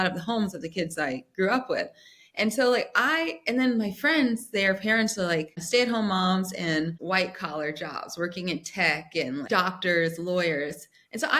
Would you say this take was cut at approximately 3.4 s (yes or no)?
no